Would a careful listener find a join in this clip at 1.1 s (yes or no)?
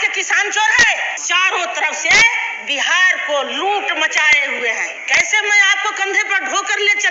yes